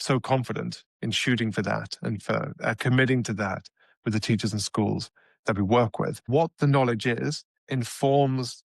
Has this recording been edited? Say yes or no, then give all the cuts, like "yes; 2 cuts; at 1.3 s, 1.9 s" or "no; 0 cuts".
yes; 1 cut; at 6.3 s